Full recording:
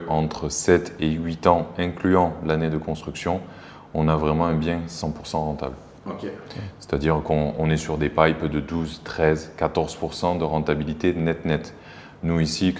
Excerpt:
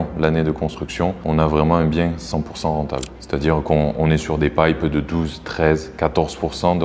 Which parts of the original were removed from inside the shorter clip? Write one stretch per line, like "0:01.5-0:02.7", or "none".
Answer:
0:03.4-0:03.9
0:05.8-0:06.7

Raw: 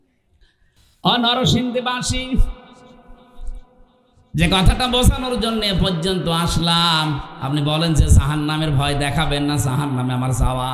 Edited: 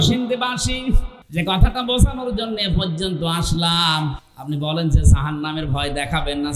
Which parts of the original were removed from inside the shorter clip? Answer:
0:02.6-0:04.2

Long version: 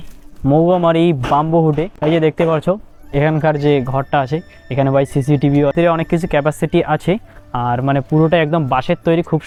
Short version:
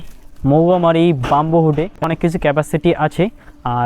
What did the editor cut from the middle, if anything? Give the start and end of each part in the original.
0:02.0-0:05.9

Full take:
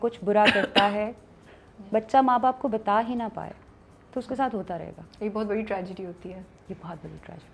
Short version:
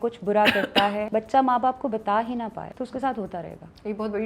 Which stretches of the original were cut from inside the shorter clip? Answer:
0:01.1-0:01.9
0:03.4-0:04.0

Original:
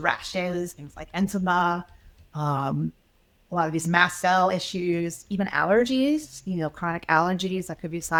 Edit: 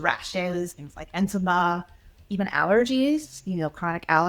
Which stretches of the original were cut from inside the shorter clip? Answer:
0:02.2-0:05.2

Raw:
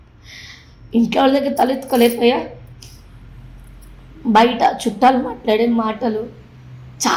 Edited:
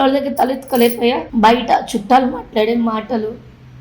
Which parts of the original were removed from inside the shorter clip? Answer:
0:02.5-0:04.2

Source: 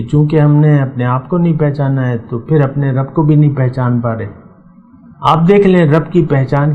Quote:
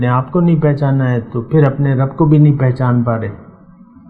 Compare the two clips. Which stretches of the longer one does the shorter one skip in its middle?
none

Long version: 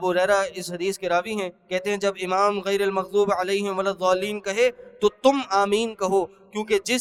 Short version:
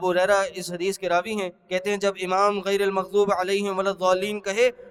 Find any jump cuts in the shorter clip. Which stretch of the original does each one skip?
none

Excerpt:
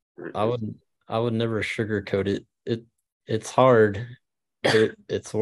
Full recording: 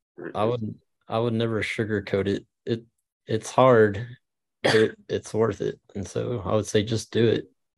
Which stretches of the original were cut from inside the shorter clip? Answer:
none

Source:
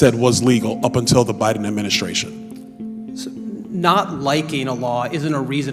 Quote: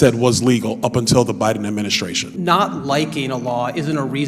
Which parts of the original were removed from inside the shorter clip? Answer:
0:02.2-0:03.6

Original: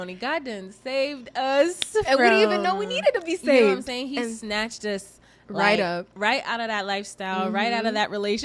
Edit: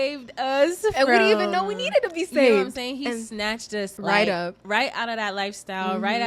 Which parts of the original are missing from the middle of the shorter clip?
0:01.7-0:01.9
0:05.0-0:05.4

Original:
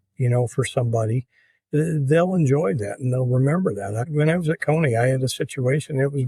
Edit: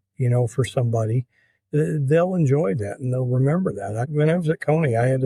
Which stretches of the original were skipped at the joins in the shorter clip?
none

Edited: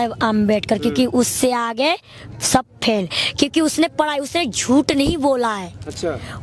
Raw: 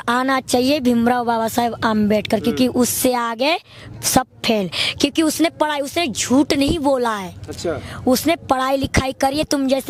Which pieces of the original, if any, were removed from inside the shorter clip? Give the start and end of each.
none

